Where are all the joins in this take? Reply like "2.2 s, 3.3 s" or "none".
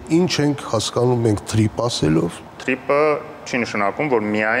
2.5 s